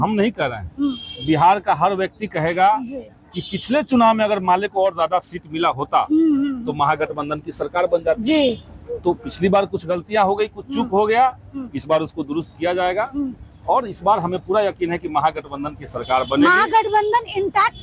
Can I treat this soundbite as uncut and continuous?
yes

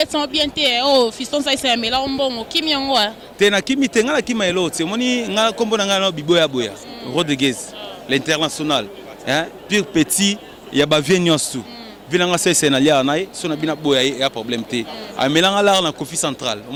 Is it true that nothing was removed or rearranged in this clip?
yes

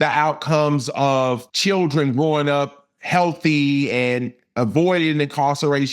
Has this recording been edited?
yes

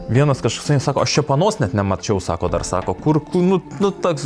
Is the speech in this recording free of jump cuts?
yes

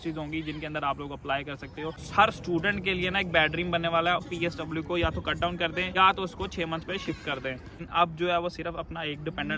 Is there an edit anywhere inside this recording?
yes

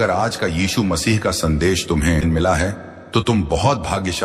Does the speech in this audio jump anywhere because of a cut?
yes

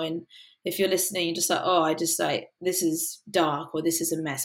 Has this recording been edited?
no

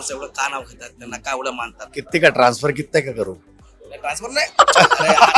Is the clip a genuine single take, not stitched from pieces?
no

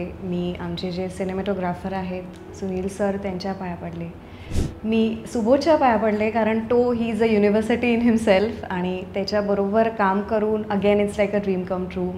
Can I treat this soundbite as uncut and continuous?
yes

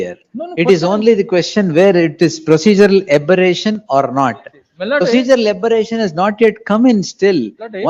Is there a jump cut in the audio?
no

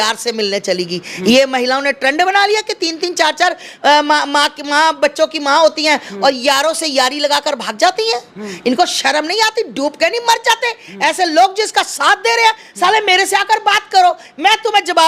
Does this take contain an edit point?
no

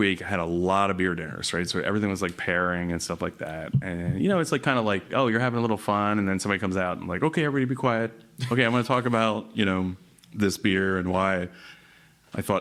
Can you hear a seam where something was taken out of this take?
no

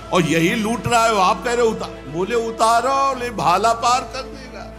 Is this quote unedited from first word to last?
yes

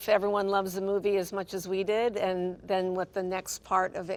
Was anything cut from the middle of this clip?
no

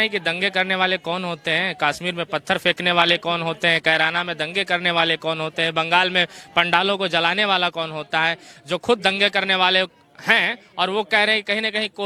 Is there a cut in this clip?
no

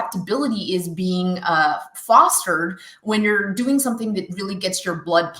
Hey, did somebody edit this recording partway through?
no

